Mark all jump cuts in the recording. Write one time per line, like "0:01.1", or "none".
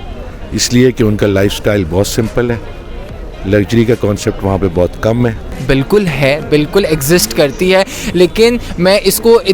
0:05.5